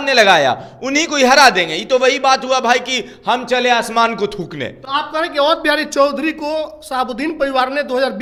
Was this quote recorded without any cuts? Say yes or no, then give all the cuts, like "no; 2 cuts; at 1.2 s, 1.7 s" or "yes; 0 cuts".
yes; 0 cuts